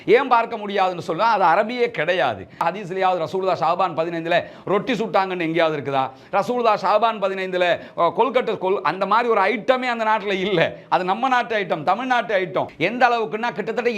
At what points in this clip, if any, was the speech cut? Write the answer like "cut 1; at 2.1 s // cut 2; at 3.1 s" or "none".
cut 1; at 2.6 s // cut 2; at 12.7 s